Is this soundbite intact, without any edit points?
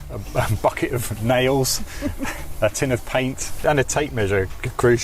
no; 1 cut; at 3.7 s

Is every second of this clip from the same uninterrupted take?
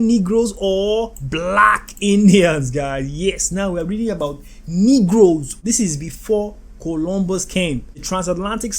no; 1 cut; at 5.6 s

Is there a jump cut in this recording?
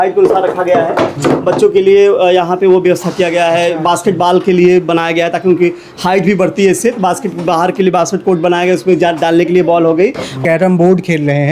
yes; 1 cut; at 10.4 s

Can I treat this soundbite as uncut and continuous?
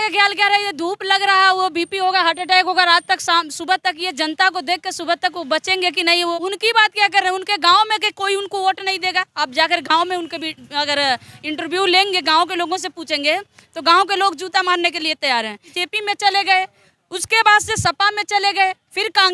no; 2 cuts; at 6.3 s, 15.8 s

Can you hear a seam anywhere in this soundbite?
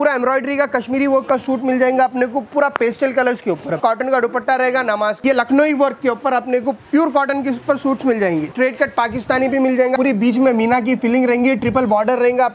yes; 4 cuts; at 3.8 s, 5.2 s, 8.5 s, 9.9 s

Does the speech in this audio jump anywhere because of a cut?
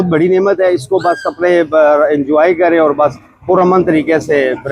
no; 0 cuts

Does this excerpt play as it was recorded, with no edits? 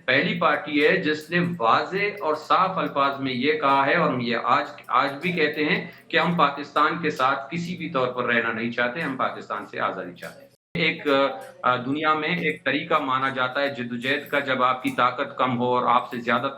no; 1 cut; at 10.8 s

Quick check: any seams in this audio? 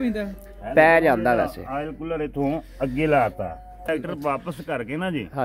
yes; 1 cut; at 3.9 s

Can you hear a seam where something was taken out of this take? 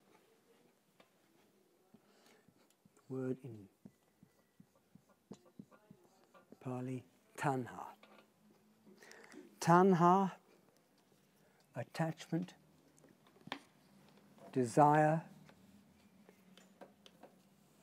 yes; 1 cut; at 14.9 s

